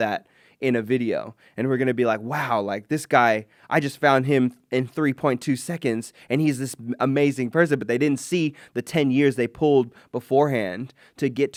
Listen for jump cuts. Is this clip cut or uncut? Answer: uncut